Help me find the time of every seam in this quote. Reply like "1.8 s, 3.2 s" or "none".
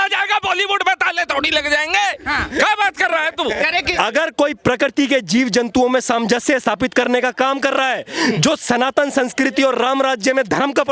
3.9 s